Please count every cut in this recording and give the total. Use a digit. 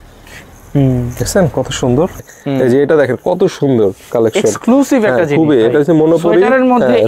1